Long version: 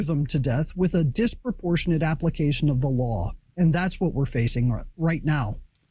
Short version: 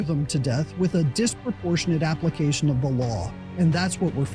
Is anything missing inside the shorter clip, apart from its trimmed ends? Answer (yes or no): no